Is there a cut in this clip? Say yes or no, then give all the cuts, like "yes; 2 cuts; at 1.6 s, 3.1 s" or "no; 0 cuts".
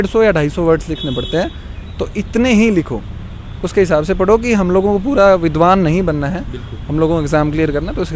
no; 0 cuts